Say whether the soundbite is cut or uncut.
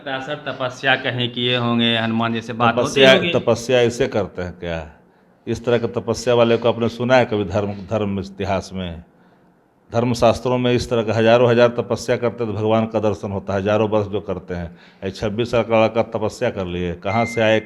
uncut